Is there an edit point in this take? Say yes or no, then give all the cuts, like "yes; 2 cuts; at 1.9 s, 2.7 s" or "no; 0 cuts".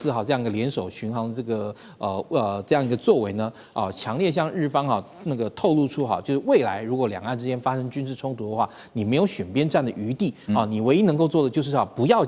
no; 0 cuts